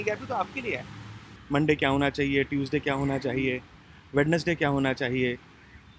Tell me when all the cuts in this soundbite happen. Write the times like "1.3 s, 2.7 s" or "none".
1.3 s